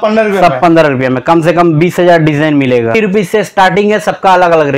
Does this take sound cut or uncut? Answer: cut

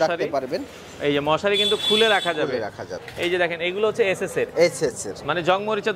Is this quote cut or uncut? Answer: cut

